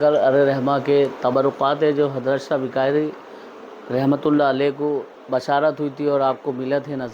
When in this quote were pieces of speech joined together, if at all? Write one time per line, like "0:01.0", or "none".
0:05.1